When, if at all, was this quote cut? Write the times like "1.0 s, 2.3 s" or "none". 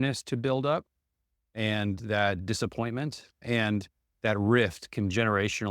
3.4 s